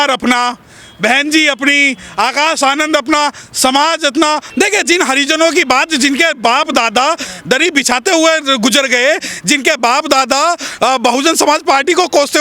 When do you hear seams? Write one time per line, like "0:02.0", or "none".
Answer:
0:04.5